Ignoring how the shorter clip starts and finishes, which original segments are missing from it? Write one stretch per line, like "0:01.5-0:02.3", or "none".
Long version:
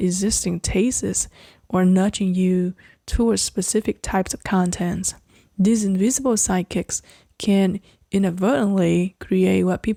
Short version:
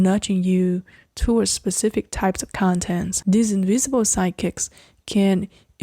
0:05.0-0:05.5